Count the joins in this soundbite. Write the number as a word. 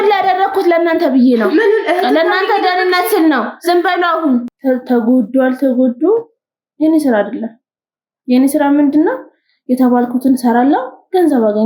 one